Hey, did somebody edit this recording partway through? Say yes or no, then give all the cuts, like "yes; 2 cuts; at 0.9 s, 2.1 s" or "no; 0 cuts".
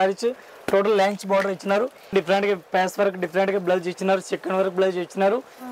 yes; 1 cut; at 2.1 s